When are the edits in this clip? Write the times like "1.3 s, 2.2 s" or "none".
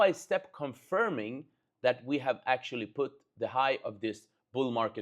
none